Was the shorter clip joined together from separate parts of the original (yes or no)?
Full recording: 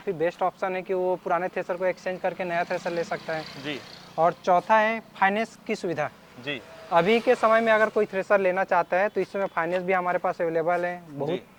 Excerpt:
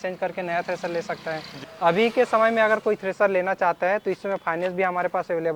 yes